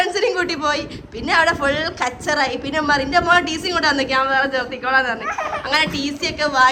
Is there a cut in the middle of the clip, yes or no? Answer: no